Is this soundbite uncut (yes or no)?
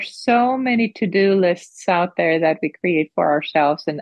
yes